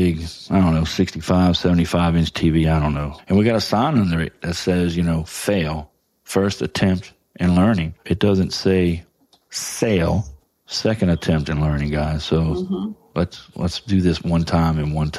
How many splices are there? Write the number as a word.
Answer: two